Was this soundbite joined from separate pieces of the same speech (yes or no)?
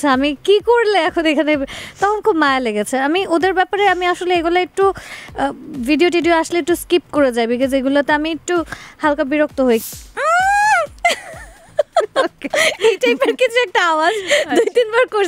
yes